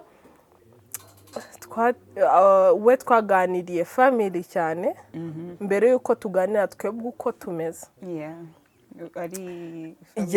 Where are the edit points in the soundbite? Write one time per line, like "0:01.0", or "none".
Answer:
none